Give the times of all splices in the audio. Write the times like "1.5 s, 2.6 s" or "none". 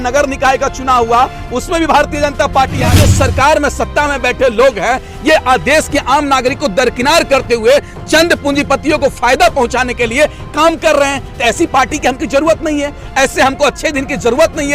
2.8 s